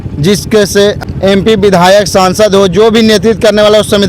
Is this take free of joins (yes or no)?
no